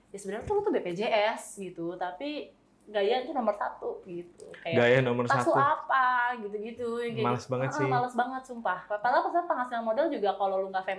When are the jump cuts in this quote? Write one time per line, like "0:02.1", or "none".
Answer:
none